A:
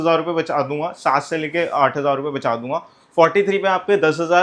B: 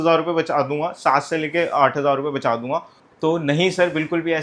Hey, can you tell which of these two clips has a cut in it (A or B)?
B